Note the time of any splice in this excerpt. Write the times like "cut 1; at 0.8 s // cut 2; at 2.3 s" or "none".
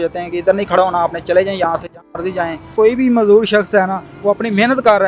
cut 1; at 2.7 s